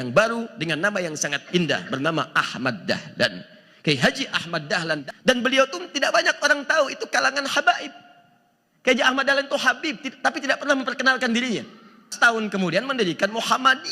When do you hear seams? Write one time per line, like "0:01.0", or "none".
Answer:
0:05.0
0:12.1